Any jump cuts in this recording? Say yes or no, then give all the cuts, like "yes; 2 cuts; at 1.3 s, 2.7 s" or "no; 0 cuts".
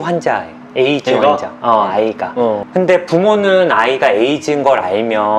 no; 0 cuts